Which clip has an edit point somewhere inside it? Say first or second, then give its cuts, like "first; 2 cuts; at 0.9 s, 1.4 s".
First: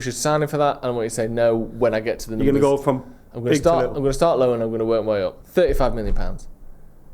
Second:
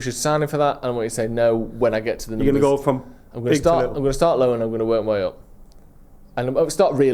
first; 1 cut; at 5.4 s